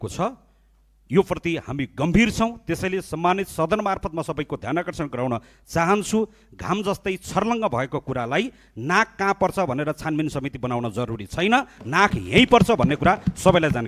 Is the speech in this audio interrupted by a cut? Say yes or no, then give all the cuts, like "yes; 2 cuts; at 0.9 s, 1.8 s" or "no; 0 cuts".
no; 0 cuts